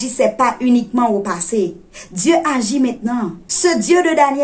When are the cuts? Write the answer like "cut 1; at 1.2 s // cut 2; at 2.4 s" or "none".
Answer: cut 1; at 3.4 s

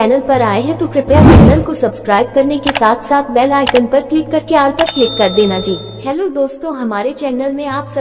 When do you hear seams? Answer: cut 1; at 5.9 s

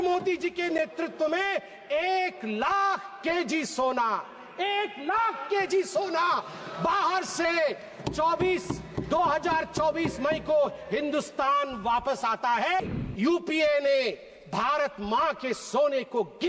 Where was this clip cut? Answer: cut 1; at 12.8 s

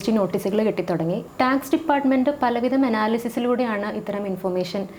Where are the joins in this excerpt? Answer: cut 1; at 1.3 s

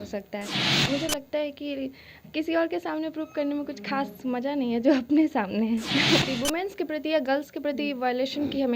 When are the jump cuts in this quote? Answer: cut 1; at 0.8 s // cut 2; at 6.2 s

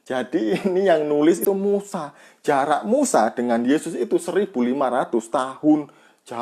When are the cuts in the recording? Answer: cut 1; at 1.4 s

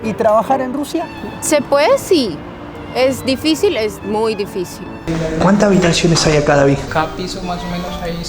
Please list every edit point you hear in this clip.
cut 1; at 4.9 s // cut 2; at 6.9 s

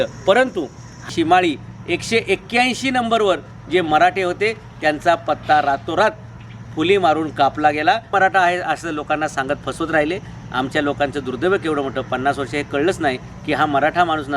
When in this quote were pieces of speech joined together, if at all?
cut 1; at 1.1 s // cut 2; at 8.1 s

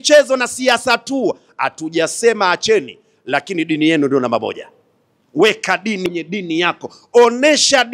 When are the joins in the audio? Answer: cut 1; at 6.0 s

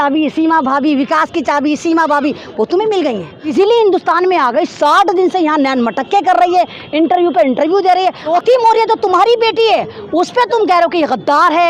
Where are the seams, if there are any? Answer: cut 1; at 3.5 s // cut 2; at 8.3 s

